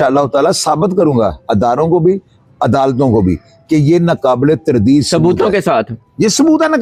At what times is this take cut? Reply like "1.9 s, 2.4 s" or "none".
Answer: none